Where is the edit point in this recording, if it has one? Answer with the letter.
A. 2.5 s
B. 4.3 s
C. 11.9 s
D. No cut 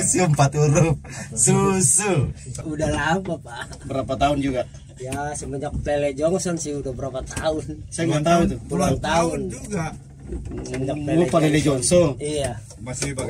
A